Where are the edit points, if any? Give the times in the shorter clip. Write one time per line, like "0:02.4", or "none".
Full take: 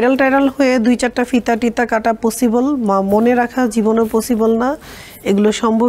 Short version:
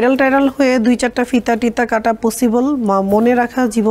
none